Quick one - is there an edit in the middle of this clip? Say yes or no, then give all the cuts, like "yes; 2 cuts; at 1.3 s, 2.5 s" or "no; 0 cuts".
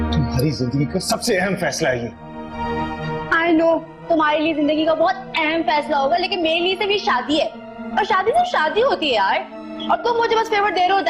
yes; 1 cut; at 9.8 s